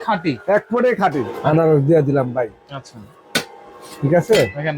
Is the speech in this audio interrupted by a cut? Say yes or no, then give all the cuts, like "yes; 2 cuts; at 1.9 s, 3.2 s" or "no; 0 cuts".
yes; 1 cut; at 1.3 s